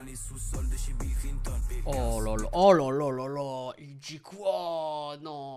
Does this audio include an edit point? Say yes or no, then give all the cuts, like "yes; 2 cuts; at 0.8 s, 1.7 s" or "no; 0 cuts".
no; 0 cuts